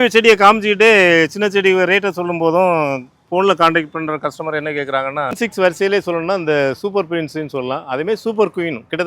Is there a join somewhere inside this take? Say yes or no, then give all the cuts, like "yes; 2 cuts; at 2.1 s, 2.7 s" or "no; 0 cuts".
yes; 1 cut; at 5.3 s